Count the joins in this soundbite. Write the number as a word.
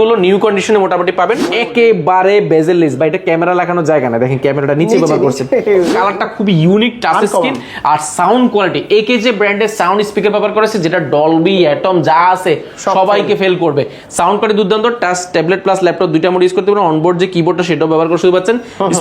two